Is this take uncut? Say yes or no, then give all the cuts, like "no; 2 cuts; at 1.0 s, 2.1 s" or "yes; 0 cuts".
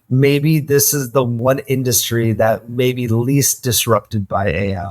no; 1 cut; at 1.3 s